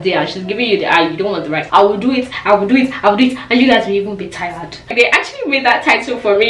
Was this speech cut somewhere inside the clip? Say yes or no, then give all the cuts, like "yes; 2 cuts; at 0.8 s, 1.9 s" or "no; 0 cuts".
yes; 2 cuts; at 1.6 s, 4.9 s